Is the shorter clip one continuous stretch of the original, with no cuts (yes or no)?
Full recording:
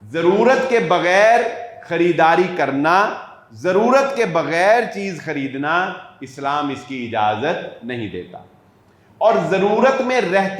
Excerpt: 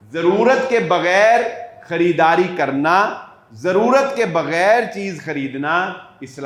yes